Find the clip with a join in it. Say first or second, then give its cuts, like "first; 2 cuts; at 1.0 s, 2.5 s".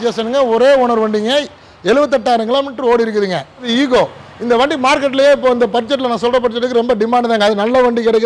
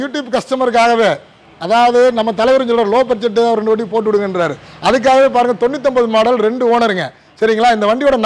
first; 1 cut; at 3.7 s